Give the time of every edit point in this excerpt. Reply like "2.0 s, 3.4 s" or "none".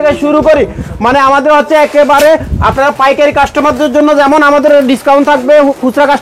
none